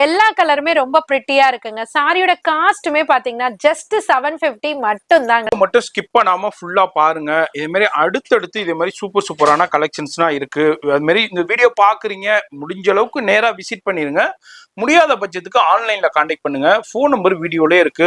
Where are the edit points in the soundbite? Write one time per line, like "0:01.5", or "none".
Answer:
none